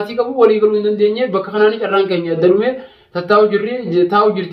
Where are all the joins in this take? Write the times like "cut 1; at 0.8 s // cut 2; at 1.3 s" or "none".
none